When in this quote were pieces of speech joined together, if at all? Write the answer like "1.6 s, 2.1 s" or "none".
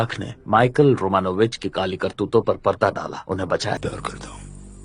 3.8 s